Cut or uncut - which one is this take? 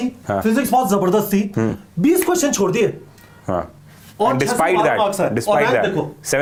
uncut